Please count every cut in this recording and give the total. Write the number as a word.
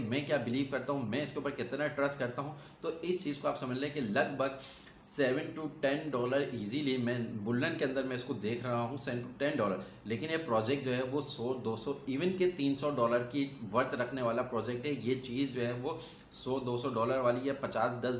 zero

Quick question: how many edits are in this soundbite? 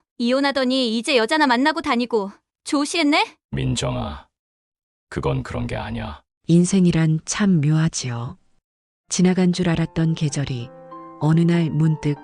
two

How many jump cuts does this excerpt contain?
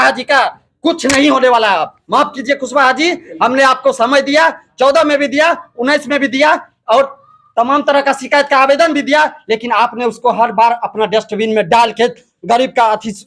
zero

